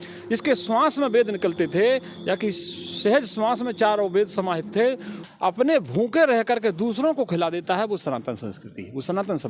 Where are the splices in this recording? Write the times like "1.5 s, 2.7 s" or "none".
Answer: 5.2 s